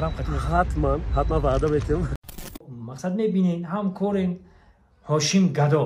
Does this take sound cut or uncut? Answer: cut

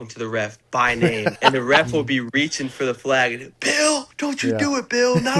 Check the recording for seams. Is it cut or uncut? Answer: cut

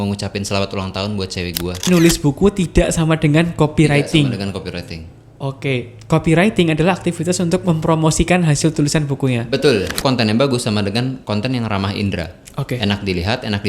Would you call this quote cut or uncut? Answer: cut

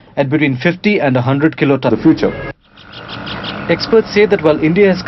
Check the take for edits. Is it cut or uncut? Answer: uncut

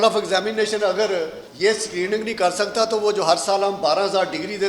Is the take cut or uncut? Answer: cut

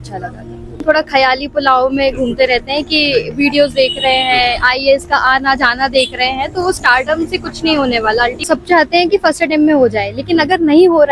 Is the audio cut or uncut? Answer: cut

